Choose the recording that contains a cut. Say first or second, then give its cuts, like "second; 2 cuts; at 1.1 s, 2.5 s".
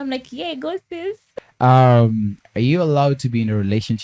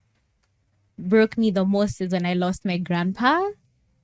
first; 1 cut; at 1.3 s